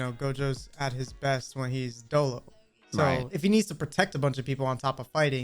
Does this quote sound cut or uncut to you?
cut